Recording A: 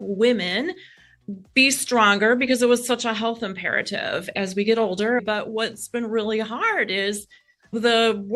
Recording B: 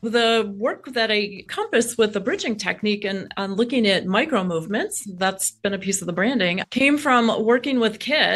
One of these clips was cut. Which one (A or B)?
A